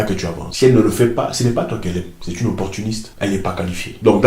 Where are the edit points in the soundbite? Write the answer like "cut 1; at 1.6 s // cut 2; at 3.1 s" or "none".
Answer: none

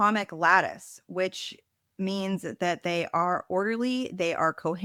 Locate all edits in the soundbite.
none

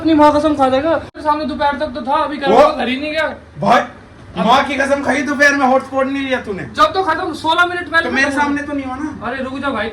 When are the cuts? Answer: cut 1; at 1.1 s

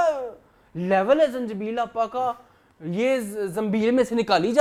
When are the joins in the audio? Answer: none

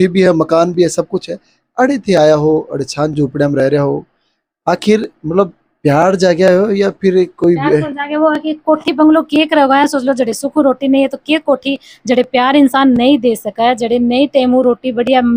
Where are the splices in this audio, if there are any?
none

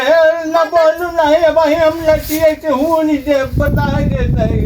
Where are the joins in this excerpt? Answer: none

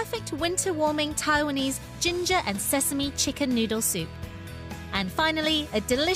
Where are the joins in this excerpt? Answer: cut 1; at 2.9 s

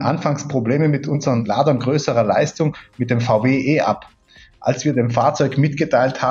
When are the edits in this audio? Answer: cut 1; at 1.4 s

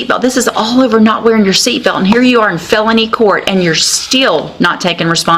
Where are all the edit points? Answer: none

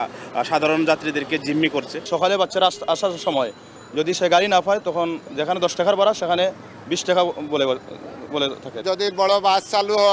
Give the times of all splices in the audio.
none

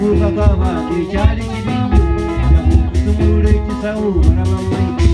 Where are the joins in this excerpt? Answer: none

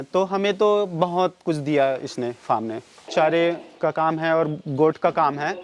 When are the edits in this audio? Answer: cut 1; at 3.1 s

